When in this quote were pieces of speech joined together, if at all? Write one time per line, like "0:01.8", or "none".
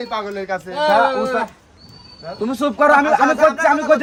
none